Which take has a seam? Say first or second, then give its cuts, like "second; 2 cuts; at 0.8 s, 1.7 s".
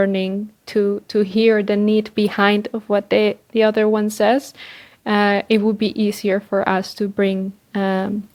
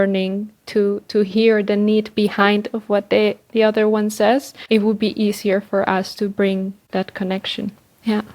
second; 2 cuts; at 4.6 s, 6.8 s